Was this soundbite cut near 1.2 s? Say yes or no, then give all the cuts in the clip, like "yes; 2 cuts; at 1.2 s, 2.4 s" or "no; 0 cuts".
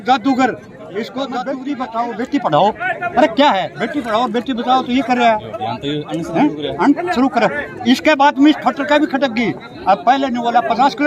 yes; 1 cut; at 1.2 s